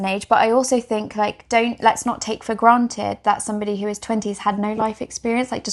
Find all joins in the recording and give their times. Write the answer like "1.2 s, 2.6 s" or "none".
none